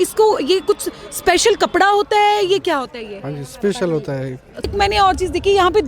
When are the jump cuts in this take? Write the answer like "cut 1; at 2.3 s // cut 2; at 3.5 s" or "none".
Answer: cut 1; at 4.7 s